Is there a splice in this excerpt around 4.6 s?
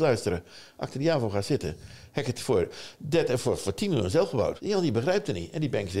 yes; 1 cut; at 4.6 s

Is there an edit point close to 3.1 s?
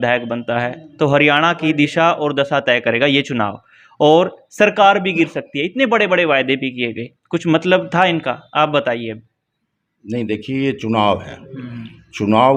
no; 0 cuts

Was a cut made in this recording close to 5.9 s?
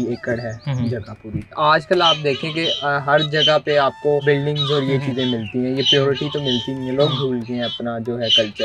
no; 2 cuts; at 1.6 s, 4.2 s

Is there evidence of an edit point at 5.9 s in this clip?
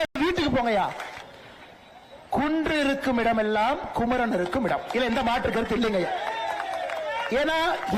no; 1 cut; at 1.1 s

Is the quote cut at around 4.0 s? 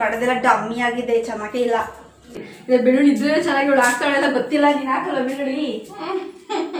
no; 1 cut; at 2.3 s

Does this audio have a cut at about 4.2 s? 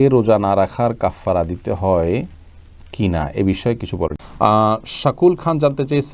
yes; 1 cut; at 4.2 s

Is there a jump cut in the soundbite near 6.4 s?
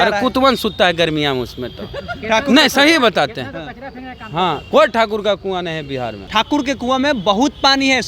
yes; 1 cut; at 6.4 s

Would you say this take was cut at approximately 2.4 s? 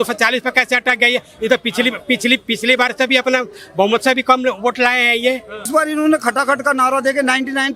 no; 1 cut; at 5.7 s

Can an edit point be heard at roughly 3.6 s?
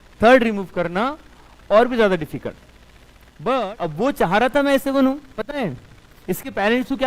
yes; 1 cut; at 3.6 s

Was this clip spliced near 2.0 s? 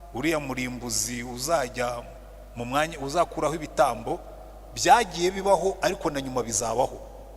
no; 0 cuts

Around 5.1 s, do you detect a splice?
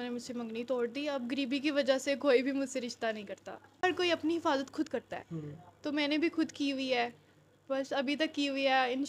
no; 1 cut; at 3.7 s

